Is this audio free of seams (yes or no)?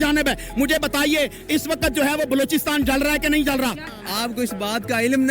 no